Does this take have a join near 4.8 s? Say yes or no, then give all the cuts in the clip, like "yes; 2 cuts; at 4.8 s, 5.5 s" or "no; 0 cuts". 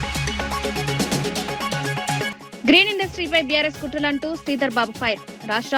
no; 2 cuts; at 1.0 s, 2.4 s